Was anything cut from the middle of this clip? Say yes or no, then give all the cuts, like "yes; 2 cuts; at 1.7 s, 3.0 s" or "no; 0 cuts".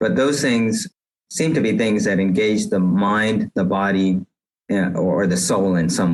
yes; 1 cut; at 1.0 s